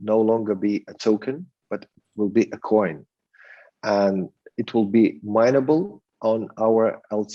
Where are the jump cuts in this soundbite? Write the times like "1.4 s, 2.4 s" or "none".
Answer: none